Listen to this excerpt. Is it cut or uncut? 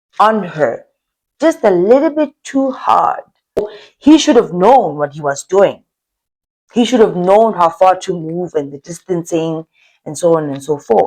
cut